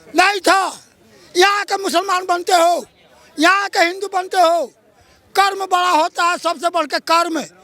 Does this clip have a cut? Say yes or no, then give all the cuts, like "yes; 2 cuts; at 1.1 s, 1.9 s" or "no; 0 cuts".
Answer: no; 0 cuts